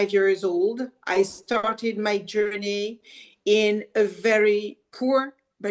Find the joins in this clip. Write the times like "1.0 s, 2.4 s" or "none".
none